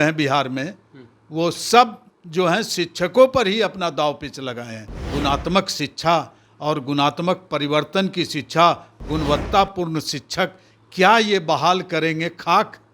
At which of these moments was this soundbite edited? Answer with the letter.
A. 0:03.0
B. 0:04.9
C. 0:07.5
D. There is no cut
B